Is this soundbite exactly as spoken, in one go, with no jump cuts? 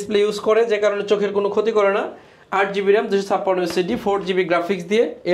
yes; 0 cuts

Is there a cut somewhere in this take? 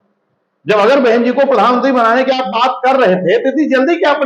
no; 0 cuts

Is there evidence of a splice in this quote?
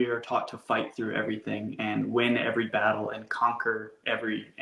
no; 0 cuts

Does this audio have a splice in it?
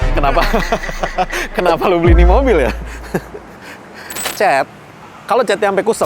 yes; 1 cut; at 4.2 s

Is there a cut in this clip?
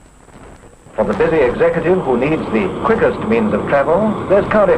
no; 0 cuts

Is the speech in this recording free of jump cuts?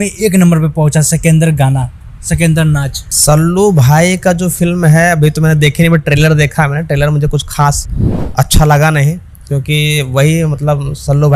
yes; 0 cuts

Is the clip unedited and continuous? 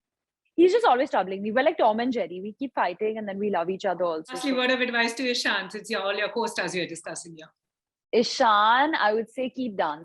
no; 1 cut; at 4.4 s

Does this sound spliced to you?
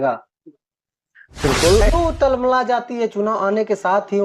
yes; 1 cut; at 1.8 s

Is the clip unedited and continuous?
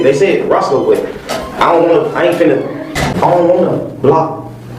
yes; 0 cuts

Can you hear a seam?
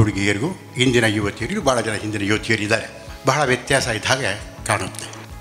no; 0 cuts

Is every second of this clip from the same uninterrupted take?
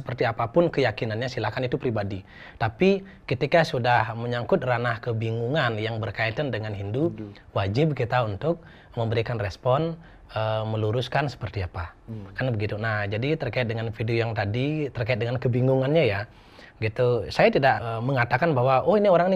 no; 1 cut; at 17.9 s

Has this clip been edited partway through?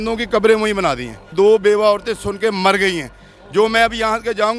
yes; 1 cut; at 1.3 s

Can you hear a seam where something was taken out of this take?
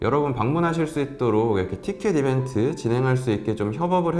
no; 0 cuts

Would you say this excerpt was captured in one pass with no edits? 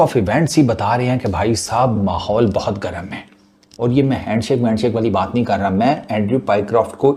yes; 0 cuts

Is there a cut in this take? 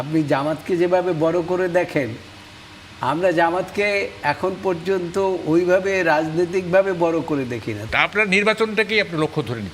yes; 1 cut; at 7.7 s

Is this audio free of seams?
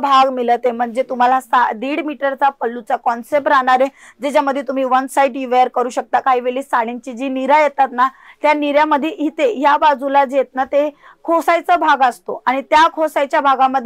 yes; 0 cuts

